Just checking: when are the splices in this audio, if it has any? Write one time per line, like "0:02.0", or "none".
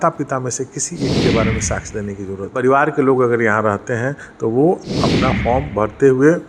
0:02.6